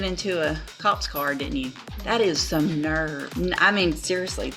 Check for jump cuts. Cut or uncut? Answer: cut